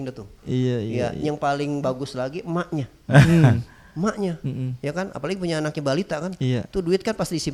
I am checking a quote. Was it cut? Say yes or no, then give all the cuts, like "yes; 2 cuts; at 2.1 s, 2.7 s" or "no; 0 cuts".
no; 0 cuts